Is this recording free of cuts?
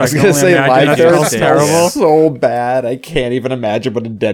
yes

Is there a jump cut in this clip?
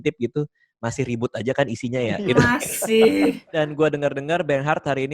yes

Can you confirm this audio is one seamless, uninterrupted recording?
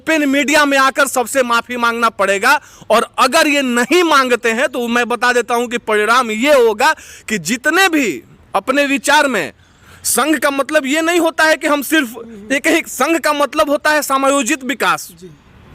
yes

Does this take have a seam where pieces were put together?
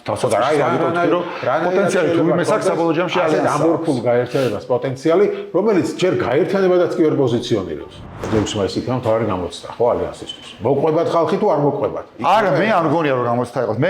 yes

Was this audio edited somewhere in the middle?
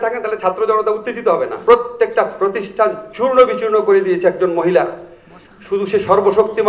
yes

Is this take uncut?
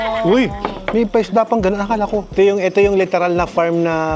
no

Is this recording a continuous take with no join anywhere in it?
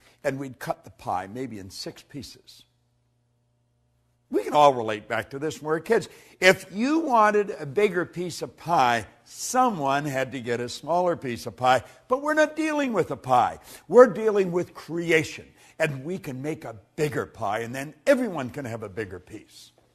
no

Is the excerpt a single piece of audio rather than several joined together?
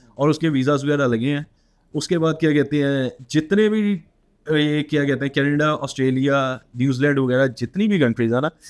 yes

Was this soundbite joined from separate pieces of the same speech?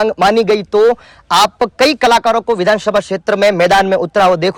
no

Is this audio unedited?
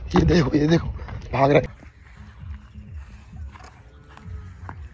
no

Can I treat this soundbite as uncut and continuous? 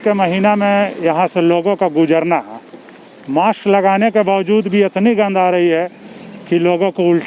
yes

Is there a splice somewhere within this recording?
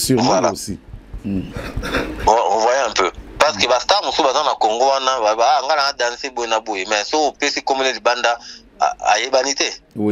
no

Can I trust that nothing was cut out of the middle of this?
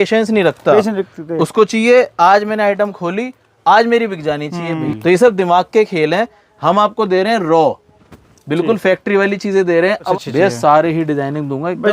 no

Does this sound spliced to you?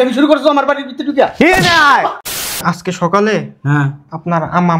yes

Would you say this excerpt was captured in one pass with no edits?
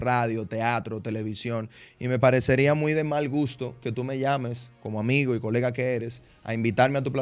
yes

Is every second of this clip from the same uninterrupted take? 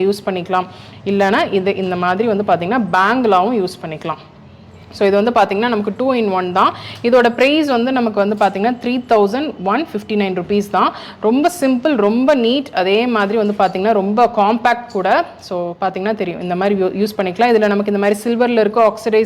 yes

